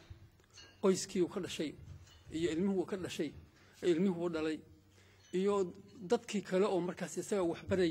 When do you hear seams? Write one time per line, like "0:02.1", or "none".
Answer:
none